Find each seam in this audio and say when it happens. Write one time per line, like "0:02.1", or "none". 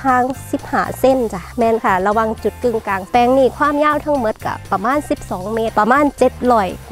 0:01.4
0:03.1
0:05.7